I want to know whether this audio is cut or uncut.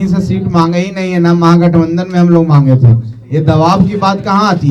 uncut